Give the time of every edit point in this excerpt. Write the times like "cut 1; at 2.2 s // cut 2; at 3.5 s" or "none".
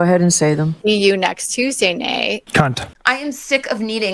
cut 1; at 2.9 s